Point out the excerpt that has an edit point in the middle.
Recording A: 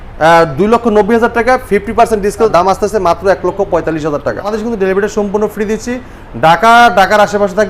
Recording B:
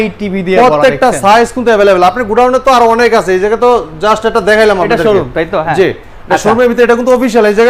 A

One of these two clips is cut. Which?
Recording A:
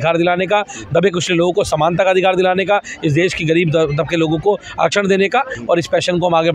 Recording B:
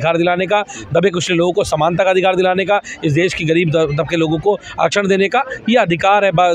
A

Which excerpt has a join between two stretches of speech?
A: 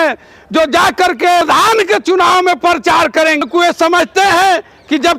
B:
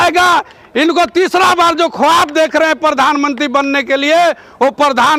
A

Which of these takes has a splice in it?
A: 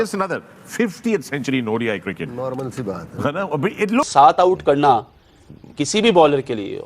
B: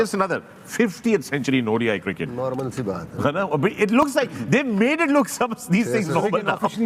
A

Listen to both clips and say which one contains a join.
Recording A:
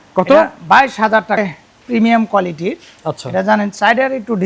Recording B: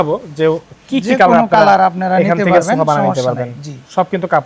A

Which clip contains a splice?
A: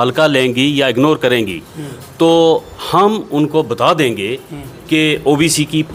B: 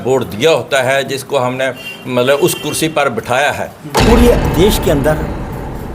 B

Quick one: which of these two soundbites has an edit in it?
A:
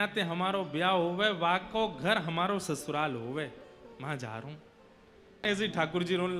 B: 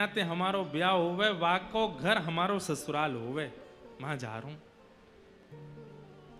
A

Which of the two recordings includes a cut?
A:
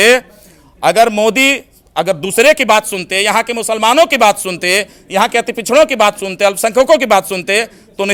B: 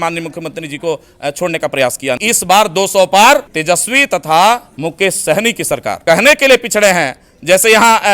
B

